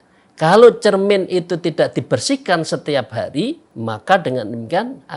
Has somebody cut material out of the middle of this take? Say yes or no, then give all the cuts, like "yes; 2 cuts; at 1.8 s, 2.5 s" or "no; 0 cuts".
yes; 1 cut; at 3.7 s